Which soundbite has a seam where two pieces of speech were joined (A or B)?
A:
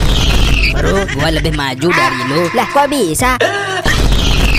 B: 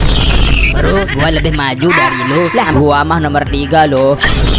B